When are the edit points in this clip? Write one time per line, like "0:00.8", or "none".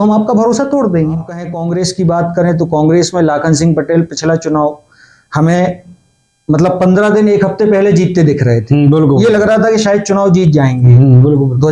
0:01.5